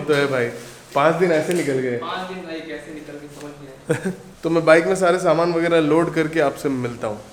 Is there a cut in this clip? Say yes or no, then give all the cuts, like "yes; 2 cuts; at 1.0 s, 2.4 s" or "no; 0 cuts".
no; 0 cuts